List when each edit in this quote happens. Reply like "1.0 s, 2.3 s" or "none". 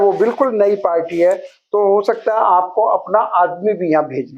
none